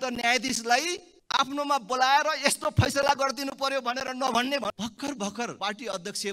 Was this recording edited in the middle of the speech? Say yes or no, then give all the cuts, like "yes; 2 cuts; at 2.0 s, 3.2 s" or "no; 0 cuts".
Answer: yes; 3 cuts; at 1.1 s, 4.7 s, 5.5 s